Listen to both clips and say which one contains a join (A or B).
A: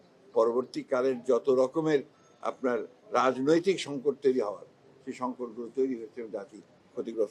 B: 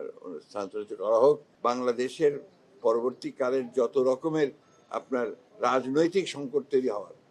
B